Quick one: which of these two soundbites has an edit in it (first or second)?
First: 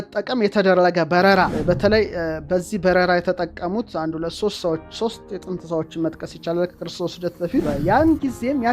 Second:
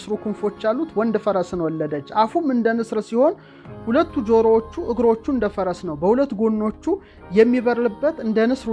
first